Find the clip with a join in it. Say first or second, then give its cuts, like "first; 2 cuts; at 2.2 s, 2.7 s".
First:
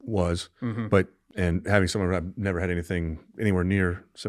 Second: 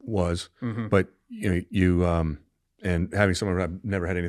first; 1 cut; at 1.2 s